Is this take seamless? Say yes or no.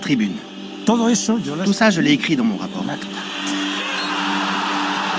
yes